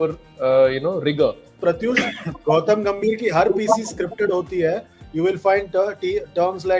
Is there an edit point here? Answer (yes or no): yes